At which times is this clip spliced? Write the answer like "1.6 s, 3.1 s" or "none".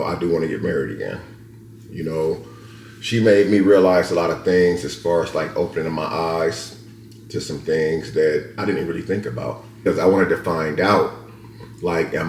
9.7 s